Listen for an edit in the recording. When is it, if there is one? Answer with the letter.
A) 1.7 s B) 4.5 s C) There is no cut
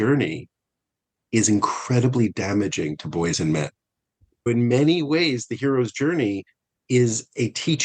B